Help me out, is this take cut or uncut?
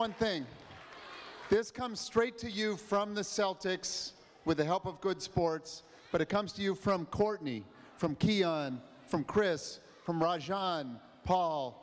uncut